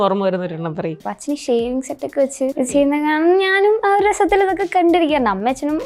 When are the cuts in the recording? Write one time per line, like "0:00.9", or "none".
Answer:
0:01.0
0:02.6